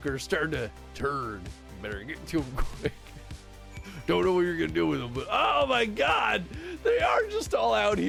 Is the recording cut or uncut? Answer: uncut